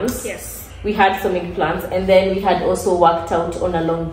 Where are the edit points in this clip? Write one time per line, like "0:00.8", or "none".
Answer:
none